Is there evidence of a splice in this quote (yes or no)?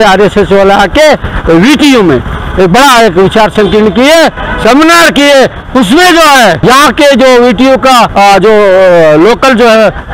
yes